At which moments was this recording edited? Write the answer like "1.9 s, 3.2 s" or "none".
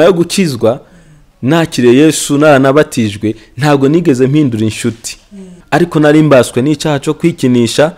5.6 s